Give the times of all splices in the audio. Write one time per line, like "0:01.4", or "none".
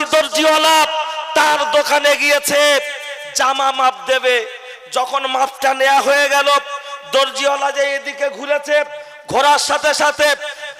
none